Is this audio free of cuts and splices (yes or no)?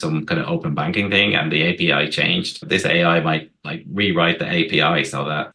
yes